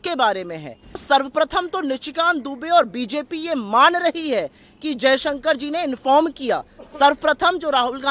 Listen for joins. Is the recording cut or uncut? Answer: cut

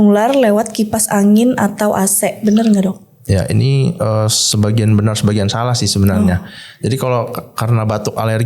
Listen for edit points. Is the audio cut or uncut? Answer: uncut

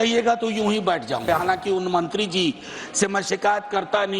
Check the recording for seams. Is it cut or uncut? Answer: cut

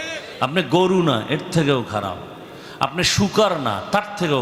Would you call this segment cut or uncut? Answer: uncut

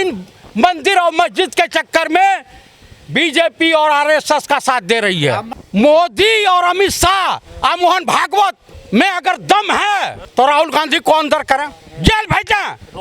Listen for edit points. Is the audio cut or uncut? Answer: cut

